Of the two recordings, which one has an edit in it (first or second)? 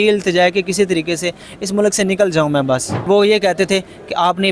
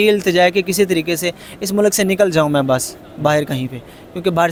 first